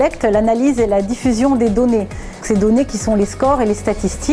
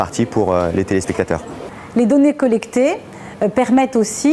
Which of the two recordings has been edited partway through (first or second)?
second